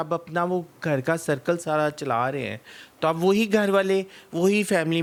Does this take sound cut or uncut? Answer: uncut